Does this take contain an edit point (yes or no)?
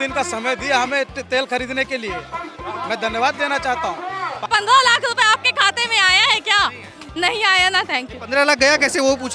yes